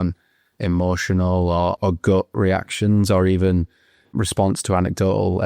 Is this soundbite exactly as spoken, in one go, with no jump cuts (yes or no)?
no